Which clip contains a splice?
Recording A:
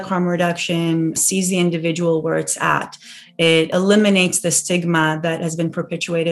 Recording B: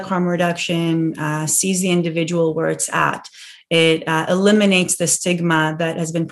A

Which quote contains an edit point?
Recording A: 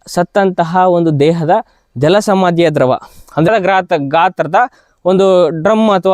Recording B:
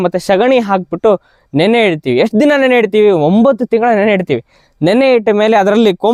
A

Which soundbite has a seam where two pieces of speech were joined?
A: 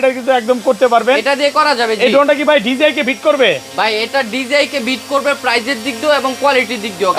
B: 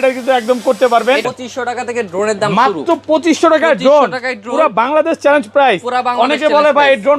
B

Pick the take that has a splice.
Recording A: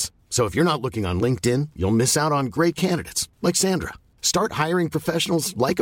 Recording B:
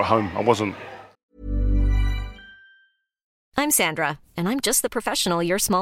B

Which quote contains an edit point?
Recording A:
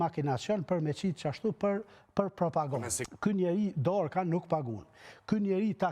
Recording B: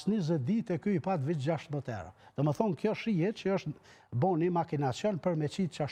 A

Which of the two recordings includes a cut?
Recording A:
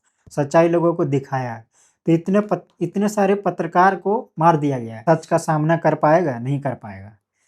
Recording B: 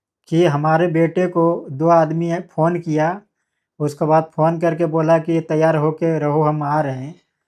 A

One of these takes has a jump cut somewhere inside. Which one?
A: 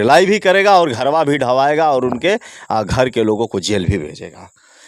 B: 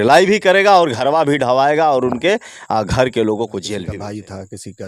B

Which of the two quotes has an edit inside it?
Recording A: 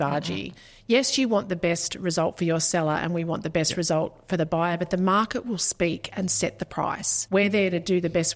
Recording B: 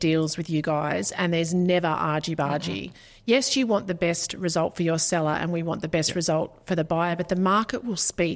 A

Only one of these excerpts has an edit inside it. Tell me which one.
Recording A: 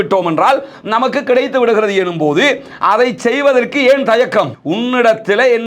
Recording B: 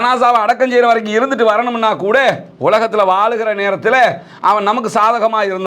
A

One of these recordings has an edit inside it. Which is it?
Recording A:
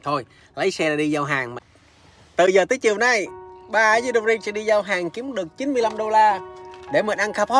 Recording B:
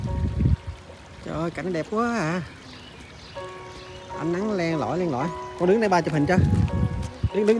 A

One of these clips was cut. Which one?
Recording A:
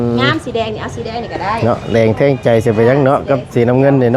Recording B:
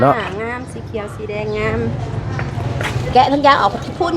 B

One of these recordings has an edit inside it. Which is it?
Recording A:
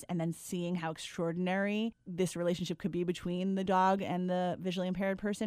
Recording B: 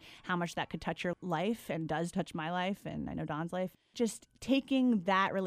B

